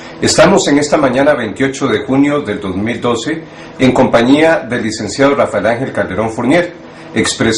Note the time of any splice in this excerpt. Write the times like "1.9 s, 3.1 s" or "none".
5.5 s